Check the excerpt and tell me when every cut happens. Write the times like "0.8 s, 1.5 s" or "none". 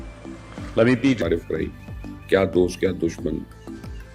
1.2 s